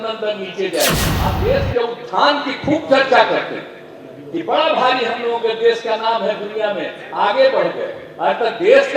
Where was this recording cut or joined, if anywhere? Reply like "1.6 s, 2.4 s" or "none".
1.1 s

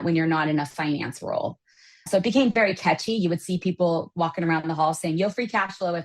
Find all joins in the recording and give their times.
none

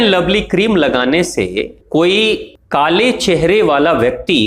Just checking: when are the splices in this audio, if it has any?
1.8 s, 2.5 s

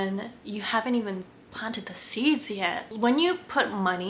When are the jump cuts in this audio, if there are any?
2.8 s

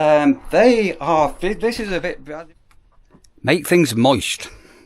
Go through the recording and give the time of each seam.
2.2 s

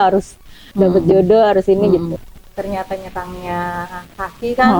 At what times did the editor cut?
2.1 s

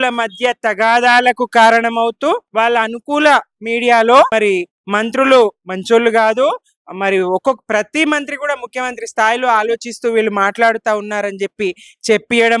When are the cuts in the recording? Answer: 2.5 s, 4.3 s

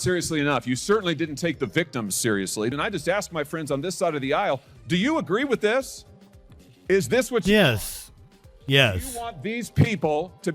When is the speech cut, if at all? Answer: 2.7 s

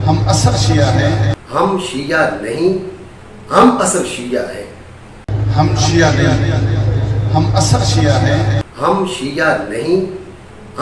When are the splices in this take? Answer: 1.4 s, 5.2 s, 8.7 s

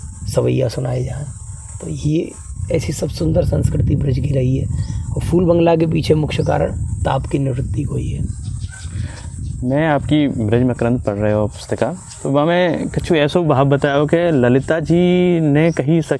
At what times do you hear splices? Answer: none

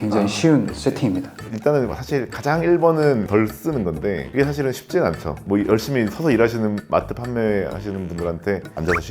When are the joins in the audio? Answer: 1.4 s

